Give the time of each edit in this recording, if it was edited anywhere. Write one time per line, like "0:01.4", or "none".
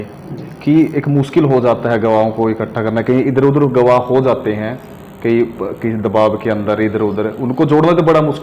none